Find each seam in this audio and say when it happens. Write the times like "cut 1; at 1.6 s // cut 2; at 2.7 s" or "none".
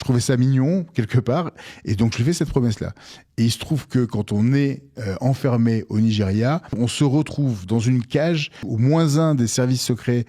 cut 1; at 6.7 s // cut 2; at 8.6 s